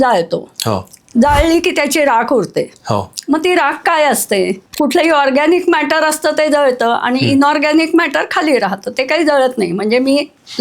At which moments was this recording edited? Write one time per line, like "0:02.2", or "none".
0:04.6